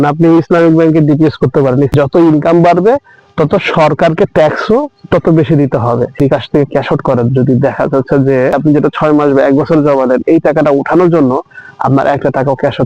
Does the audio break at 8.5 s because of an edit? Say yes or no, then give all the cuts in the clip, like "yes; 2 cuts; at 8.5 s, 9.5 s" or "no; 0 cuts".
yes; 3 cuts; at 1.9 s, 6.2 s, 8.5 s